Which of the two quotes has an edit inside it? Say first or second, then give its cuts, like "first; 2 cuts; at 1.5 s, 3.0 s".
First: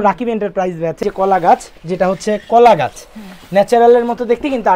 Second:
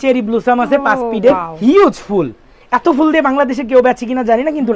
first; 1 cut; at 1.0 s